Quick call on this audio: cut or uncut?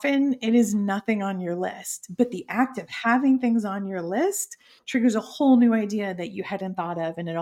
uncut